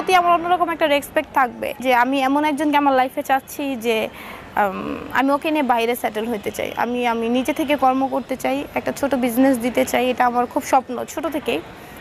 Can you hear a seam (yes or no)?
yes